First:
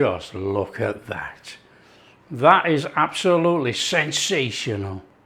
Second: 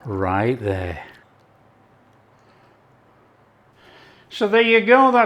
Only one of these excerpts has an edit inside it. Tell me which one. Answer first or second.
second